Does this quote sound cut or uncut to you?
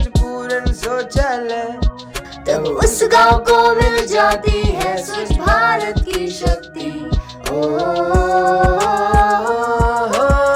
uncut